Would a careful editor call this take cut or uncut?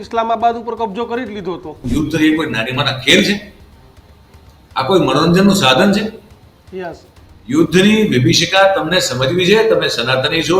cut